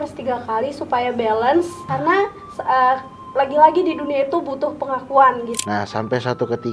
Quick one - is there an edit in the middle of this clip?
yes; 3 cuts; at 1.8 s, 3.2 s, 5.5 s

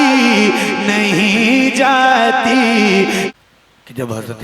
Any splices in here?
yes; 1 cut; at 3.3 s

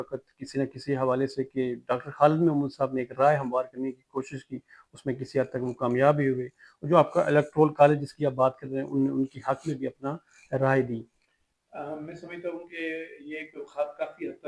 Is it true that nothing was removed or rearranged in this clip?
yes; 0 cuts

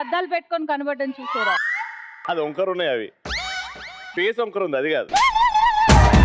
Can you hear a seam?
no; 0 cuts

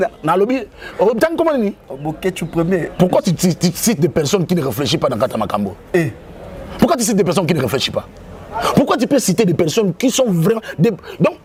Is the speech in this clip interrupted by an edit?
no; 0 cuts

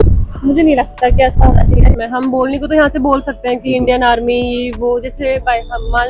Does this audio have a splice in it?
yes; 1 cut; at 1.9 s

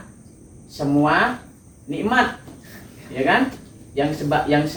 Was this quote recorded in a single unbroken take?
yes; 0 cuts

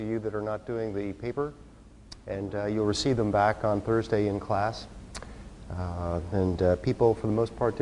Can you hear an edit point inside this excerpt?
no; 0 cuts

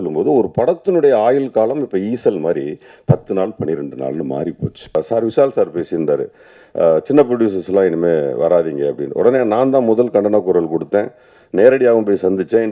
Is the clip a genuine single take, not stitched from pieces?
no; 1 cut; at 4.9 s

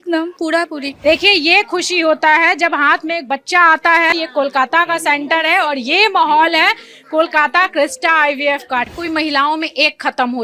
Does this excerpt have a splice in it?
yes; 3 cuts; at 0.9 s, 4.1 s, 8.9 s

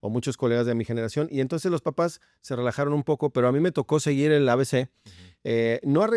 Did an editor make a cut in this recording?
no; 0 cuts

